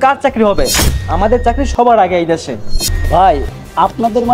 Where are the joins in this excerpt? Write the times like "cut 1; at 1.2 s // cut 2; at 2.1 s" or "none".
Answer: cut 1; at 2.8 s